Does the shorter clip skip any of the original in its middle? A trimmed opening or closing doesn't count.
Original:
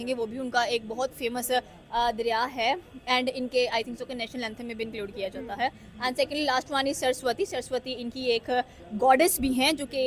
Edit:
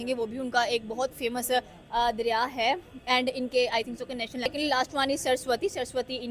yes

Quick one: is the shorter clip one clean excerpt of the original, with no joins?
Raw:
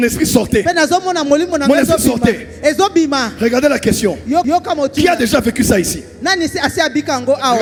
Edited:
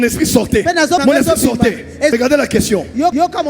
no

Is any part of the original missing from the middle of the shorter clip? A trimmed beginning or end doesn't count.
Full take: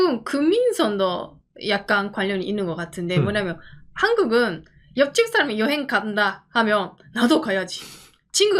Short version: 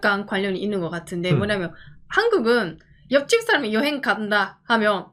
no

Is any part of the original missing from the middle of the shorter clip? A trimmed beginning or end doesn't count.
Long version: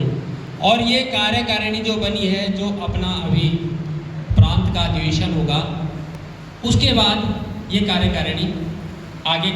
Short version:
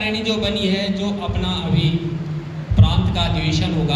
no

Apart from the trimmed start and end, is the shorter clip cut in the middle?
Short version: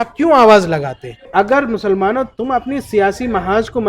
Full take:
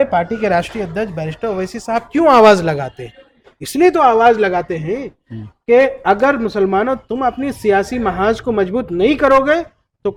yes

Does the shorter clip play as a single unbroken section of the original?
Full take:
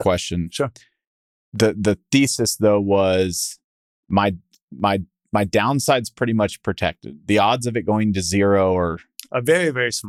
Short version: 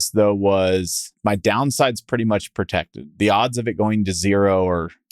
no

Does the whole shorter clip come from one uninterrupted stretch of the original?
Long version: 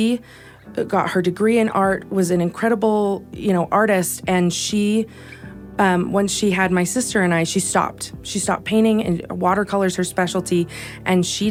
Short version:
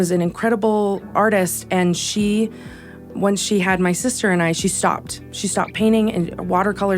no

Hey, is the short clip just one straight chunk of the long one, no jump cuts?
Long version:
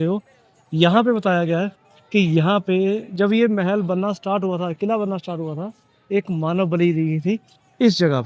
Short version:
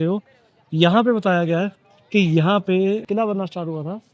no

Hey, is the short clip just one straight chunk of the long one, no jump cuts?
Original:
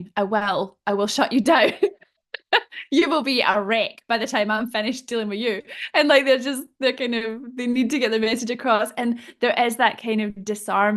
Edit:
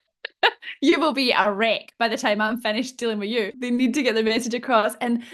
no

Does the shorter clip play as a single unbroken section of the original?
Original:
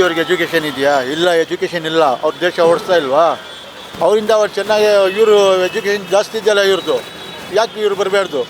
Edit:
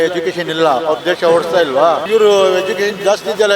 no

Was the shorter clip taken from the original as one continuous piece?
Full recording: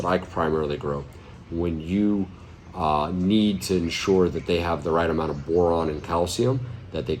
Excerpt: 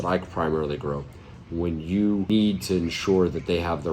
no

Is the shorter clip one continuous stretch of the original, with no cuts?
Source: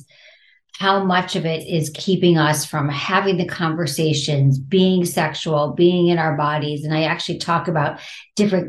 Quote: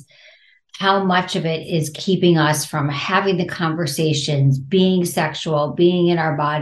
yes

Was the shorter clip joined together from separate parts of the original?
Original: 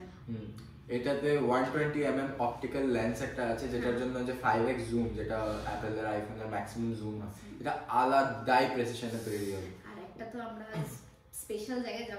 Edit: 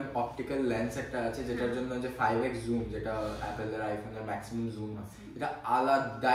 no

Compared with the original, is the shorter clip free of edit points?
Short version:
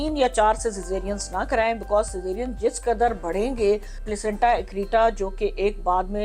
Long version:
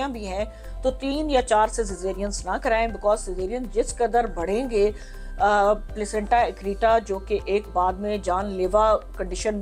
no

